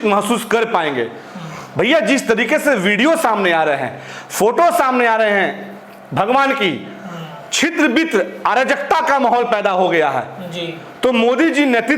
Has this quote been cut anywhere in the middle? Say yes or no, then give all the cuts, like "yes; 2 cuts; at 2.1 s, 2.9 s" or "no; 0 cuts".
no; 0 cuts